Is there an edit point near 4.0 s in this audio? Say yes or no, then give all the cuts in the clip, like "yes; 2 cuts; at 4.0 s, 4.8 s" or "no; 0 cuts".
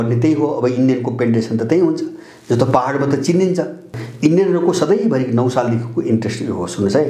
yes; 1 cut; at 4.0 s